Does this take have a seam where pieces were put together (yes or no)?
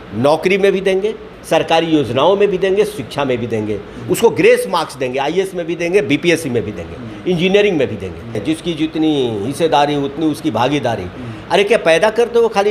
yes